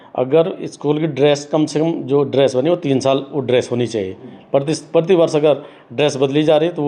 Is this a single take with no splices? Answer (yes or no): yes